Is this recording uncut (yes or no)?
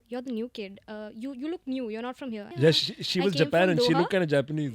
no